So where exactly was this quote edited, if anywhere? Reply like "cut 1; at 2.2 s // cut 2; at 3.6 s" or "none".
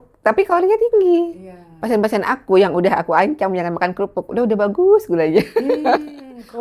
none